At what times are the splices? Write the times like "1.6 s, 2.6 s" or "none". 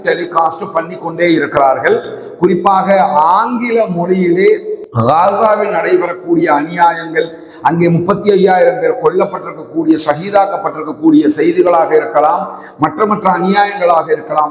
none